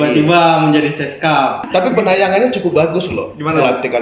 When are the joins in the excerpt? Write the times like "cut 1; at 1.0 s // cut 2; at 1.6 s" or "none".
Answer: cut 1; at 1.6 s